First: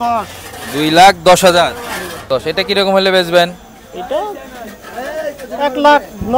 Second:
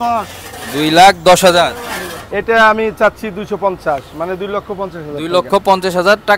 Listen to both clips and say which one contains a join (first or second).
second